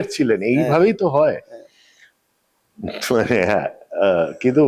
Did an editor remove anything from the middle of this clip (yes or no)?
no